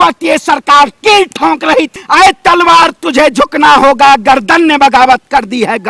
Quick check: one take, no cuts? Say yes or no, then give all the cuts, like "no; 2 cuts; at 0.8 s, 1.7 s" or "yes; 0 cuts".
no; 1 cut; at 1.9 s